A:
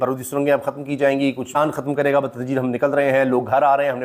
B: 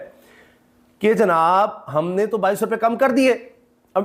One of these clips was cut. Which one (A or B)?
A